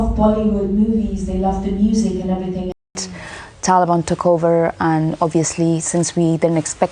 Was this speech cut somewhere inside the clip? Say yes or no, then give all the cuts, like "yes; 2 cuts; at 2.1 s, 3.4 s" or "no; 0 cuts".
yes; 1 cut; at 3.1 s